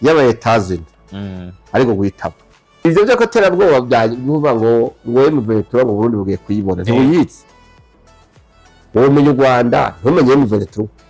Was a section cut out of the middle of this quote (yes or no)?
yes